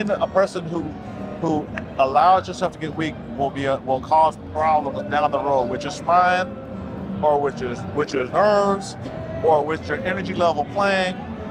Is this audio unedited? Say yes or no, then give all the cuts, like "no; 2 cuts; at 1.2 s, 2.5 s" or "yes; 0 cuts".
yes; 0 cuts